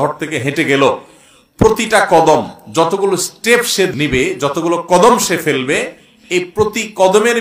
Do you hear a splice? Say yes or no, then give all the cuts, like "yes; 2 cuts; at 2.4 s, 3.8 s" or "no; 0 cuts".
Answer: yes; 1 cut; at 3.9 s